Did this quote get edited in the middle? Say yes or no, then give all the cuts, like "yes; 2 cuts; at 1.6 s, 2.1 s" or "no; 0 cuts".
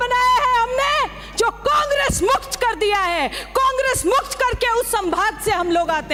no; 0 cuts